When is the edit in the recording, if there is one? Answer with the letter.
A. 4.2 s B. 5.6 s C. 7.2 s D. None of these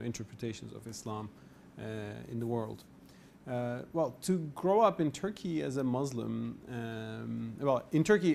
A